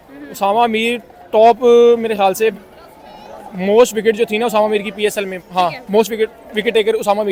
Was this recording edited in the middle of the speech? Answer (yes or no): no